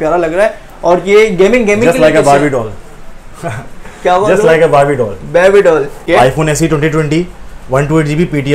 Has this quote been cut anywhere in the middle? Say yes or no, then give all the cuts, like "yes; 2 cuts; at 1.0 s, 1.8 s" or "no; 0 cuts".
yes; 1 cut; at 6.1 s